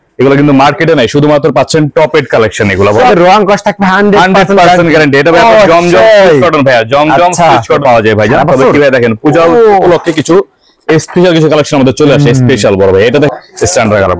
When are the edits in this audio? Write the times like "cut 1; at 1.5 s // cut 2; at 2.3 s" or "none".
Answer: cut 1; at 3.1 s // cut 2; at 7.8 s // cut 3; at 13.3 s